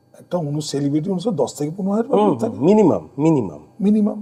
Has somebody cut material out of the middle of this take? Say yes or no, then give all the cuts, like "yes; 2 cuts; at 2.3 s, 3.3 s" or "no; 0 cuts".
no; 0 cuts